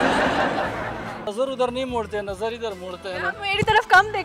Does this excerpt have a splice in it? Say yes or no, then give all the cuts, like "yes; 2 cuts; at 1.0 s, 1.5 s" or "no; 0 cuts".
yes; 1 cut; at 1.3 s